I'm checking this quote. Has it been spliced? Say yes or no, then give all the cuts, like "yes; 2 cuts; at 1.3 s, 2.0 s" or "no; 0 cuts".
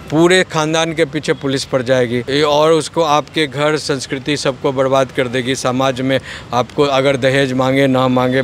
yes; 1 cut; at 2.2 s